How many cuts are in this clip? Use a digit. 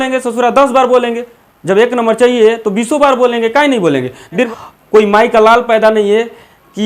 1